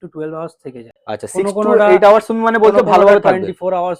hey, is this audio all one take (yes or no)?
yes